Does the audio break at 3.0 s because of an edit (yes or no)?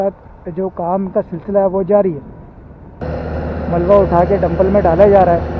yes